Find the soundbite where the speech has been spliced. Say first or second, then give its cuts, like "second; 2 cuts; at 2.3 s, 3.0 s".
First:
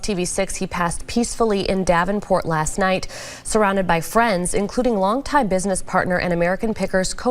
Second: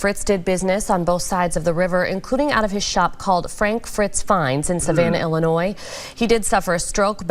first; 1 cut; at 4.4 s